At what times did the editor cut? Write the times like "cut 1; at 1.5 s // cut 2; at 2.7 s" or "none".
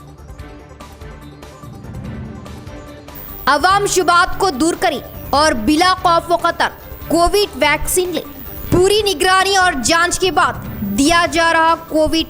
cut 1; at 2.9 s